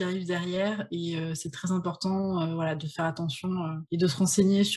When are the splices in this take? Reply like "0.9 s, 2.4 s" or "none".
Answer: 3.8 s